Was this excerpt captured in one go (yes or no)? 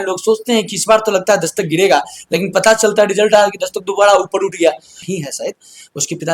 no